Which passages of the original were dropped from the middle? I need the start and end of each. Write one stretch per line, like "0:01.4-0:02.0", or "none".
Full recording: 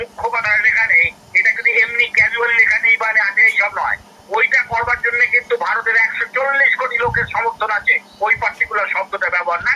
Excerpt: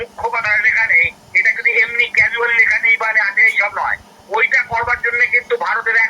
none

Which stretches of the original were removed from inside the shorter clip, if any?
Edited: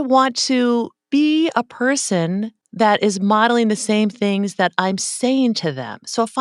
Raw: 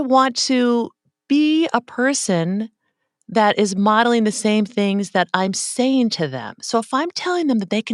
0:01.0-0:01.1
0:02.8-0:03.1

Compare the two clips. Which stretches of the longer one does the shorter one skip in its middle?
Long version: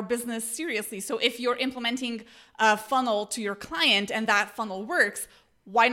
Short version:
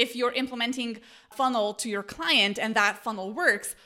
0:02.5-0:02.8

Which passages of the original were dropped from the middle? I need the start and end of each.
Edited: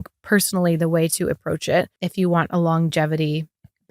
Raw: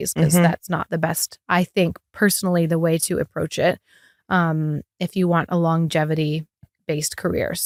0:03.9-0:05.0

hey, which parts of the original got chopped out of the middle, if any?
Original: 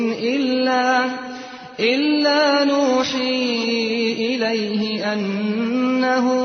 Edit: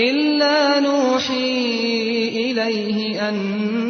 none

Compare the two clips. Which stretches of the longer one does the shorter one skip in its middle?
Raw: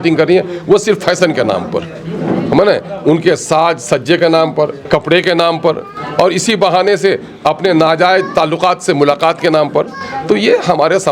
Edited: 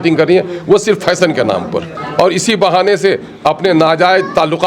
0:02.0-0:06.0

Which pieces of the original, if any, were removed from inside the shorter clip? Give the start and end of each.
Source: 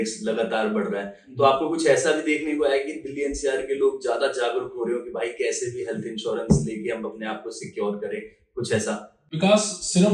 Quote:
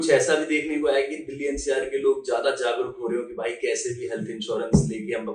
none

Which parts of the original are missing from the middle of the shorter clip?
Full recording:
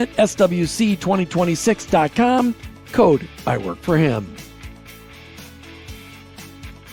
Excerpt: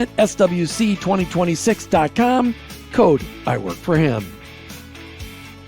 0:04.3-0:05.0

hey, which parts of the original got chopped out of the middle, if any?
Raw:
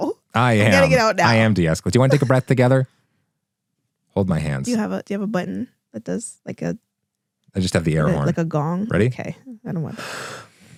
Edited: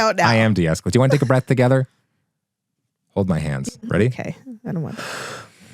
0:04.7-0:08.7

